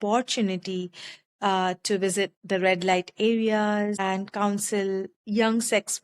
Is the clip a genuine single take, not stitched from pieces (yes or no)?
no